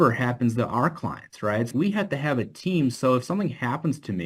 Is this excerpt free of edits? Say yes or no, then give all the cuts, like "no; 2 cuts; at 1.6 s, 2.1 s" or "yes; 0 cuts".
no; 1 cut; at 1.7 s